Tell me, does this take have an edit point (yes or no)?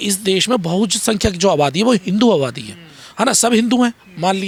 no